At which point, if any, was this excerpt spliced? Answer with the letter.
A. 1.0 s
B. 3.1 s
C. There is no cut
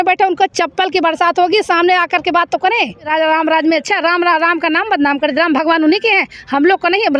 B